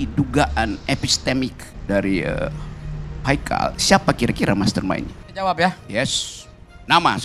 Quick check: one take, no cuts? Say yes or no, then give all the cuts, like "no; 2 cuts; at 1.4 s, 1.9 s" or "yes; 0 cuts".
no; 2 cuts; at 1.7 s, 5.2 s